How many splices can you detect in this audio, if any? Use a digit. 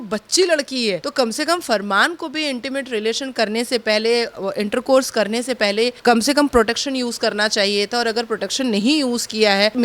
1